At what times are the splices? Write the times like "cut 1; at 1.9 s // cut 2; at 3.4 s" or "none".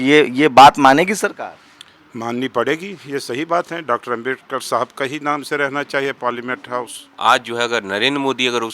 cut 1; at 7.0 s